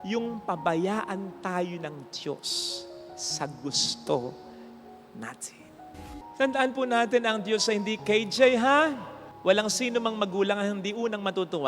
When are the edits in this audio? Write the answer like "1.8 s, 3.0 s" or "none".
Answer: 6.1 s

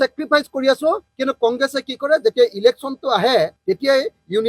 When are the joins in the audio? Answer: none

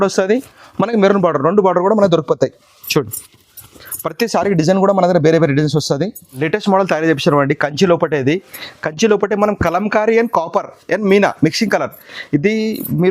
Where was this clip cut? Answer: 6.2 s

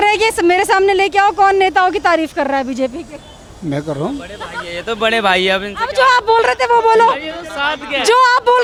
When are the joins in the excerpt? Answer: none

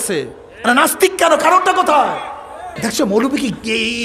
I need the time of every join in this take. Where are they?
2.7 s

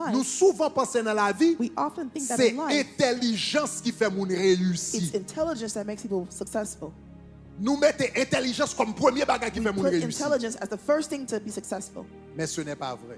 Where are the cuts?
none

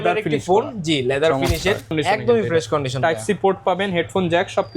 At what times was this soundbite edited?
1.9 s

